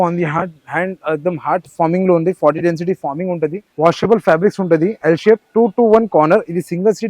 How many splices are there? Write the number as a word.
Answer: one